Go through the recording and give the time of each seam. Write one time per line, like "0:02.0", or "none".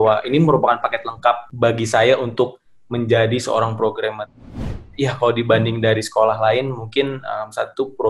0:01.5
0:04.5

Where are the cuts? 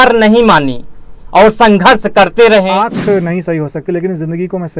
0:02.7

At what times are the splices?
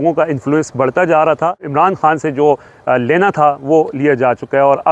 0:01.6

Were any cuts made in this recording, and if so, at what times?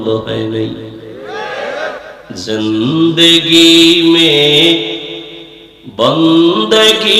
0:02.1

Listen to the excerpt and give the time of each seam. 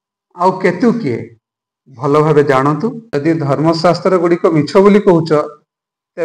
0:03.0

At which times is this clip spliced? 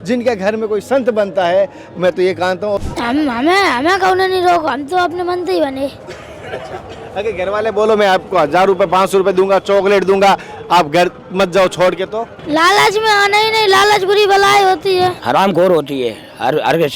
0:02.8
0:15.2

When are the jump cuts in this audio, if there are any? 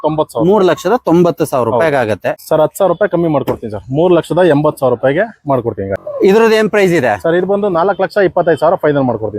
0:02.4
0:05.9

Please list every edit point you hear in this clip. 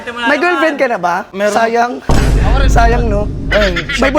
0:01.3

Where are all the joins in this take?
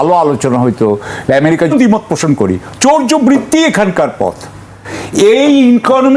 0:01.7

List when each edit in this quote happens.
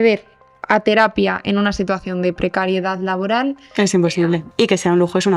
0:03.7
0:04.5

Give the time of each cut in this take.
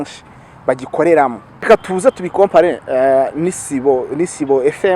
0:01.7

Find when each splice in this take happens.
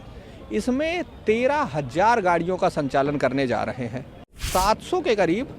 0:04.4

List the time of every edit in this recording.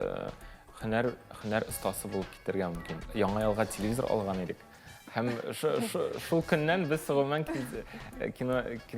0:03.1

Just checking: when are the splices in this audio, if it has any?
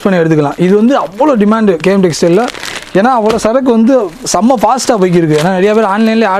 none

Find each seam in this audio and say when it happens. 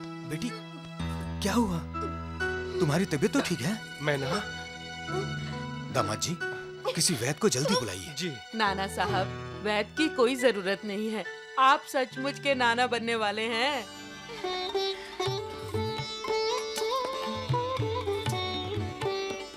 none

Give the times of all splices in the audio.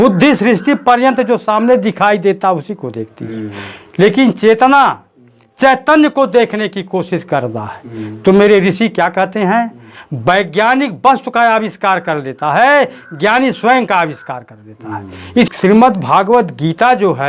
0:15.5

